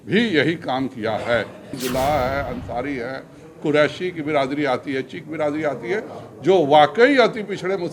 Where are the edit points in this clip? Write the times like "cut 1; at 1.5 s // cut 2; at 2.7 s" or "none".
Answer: cut 1; at 1.7 s